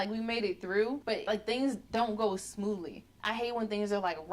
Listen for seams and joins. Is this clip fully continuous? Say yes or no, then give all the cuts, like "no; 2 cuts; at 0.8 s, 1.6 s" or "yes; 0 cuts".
no; 1 cut; at 1.5 s